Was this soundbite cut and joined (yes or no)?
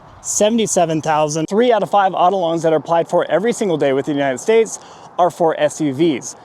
yes